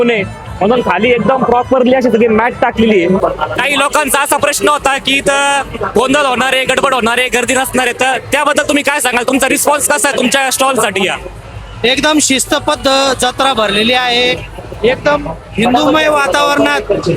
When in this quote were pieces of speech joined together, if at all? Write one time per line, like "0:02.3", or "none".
0:03.2